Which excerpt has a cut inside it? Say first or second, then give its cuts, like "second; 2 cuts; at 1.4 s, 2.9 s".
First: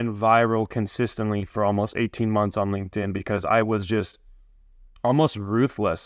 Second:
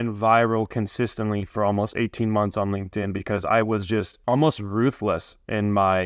second; 1 cut; at 4.1 s